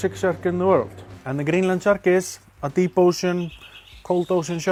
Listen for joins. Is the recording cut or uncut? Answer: uncut